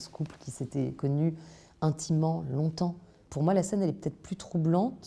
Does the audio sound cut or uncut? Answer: cut